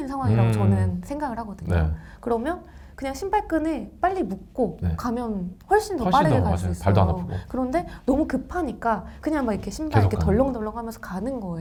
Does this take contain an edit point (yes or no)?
no